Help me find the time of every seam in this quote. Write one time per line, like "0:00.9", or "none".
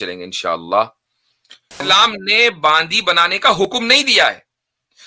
0:01.8